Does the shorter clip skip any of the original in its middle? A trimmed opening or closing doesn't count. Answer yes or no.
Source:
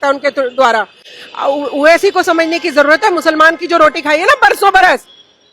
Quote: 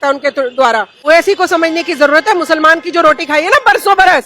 yes